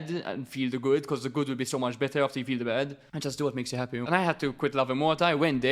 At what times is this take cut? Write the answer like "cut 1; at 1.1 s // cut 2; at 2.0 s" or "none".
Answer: cut 1; at 3.0 s // cut 2; at 4.1 s